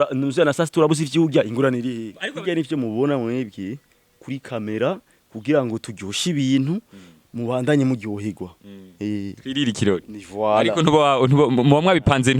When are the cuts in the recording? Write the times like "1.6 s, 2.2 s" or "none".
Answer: 2.1 s